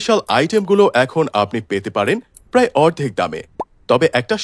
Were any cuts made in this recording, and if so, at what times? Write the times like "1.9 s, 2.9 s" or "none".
2.5 s